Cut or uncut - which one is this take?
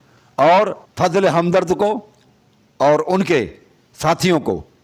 uncut